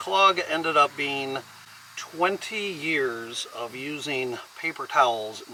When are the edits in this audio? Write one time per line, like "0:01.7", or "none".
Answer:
none

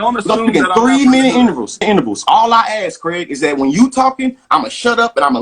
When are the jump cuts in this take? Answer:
0:01.8

